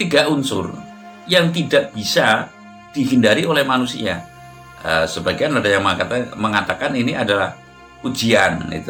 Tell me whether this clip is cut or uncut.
uncut